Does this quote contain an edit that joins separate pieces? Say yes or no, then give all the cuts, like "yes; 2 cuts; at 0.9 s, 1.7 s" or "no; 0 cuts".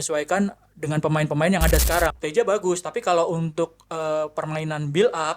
yes; 1 cut; at 2.2 s